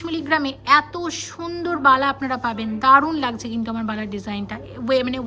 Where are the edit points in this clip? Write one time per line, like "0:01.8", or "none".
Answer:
none